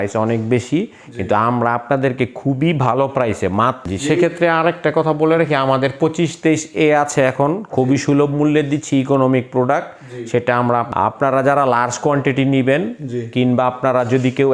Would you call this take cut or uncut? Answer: cut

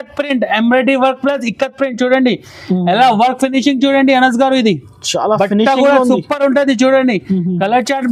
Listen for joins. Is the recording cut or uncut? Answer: uncut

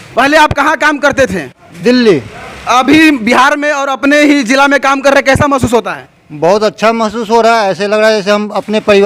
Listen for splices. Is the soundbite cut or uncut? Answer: uncut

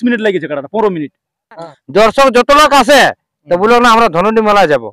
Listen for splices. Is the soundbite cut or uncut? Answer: cut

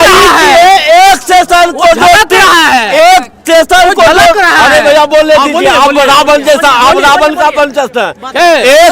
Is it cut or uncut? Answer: uncut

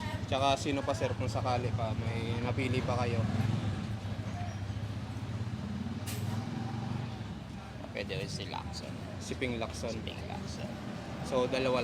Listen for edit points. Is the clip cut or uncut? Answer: uncut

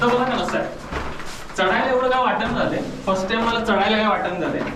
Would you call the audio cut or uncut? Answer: uncut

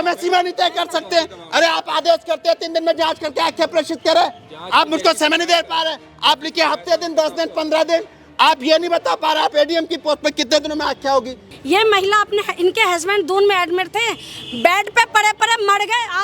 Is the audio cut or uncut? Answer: cut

